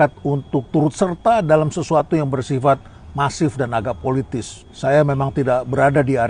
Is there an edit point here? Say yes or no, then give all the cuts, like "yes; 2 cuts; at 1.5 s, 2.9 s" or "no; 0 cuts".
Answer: no; 0 cuts